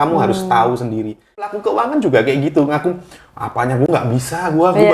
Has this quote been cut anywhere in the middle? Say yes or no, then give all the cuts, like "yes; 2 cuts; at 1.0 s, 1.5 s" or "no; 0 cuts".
yes; 1 cut; at 1.6 s